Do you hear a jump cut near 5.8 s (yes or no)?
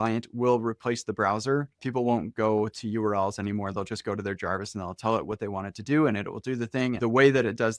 no